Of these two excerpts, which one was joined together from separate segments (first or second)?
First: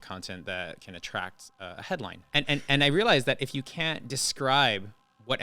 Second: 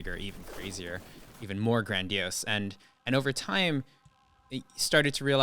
first